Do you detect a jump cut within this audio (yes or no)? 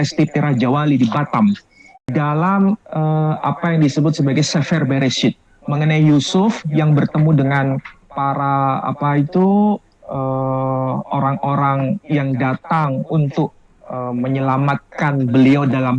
yes